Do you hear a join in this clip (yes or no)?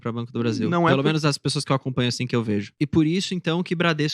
yes